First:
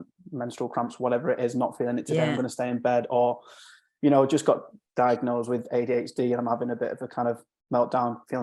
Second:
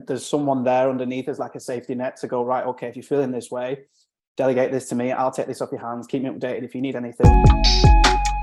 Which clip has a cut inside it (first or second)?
second